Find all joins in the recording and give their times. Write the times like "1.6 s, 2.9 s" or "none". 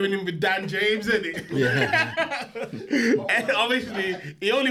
none